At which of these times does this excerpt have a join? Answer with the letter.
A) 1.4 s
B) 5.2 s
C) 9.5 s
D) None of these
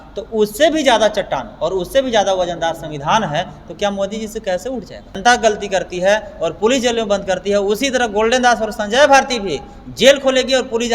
B